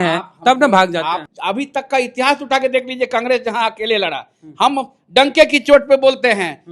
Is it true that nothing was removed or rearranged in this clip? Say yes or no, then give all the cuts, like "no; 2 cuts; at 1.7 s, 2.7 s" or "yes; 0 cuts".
no; 1 cut; at 1.2 s